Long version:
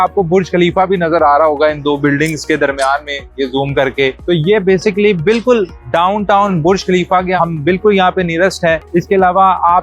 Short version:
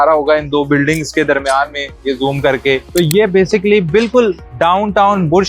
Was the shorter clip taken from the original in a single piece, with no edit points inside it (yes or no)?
yes